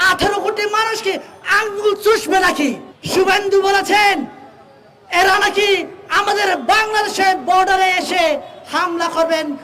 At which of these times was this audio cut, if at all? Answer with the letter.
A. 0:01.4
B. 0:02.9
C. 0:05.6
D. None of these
B